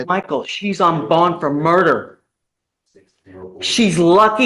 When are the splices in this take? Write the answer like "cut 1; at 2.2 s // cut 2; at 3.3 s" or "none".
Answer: none